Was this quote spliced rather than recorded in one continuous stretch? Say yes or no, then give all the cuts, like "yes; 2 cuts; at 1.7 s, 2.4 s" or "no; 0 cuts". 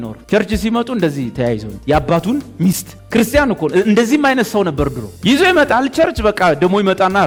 no; 0 cuts